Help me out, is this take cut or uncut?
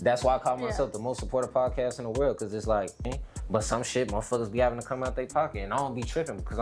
cut